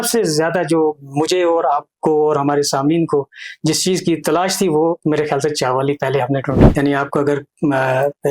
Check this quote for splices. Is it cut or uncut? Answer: cut